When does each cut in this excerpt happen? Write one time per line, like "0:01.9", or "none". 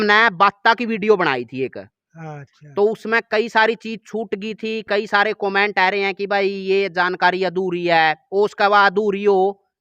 none